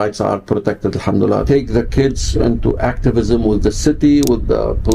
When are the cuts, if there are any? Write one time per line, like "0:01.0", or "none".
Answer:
0:01.4

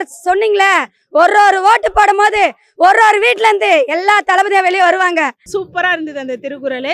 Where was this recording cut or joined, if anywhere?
0:05.4

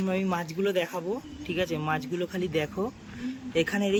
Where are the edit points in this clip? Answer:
none

